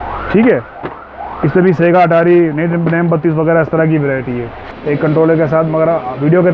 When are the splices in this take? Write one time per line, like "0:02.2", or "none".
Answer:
0:04.8